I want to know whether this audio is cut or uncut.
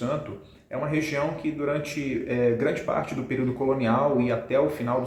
uncut